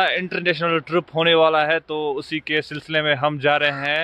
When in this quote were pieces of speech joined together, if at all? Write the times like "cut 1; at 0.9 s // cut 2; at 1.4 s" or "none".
none